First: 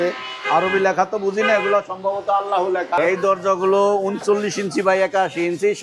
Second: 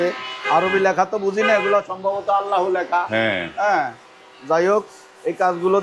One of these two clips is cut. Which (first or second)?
first